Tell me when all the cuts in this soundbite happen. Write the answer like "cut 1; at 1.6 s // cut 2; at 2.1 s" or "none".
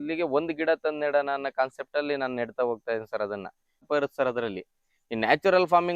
cut 1; at 3.9 s